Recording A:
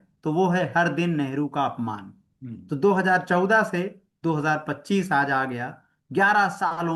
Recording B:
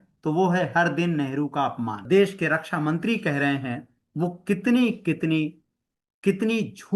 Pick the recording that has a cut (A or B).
B